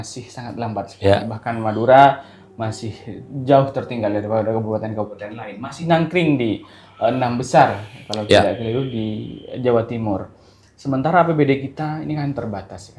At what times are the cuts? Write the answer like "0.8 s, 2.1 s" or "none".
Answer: none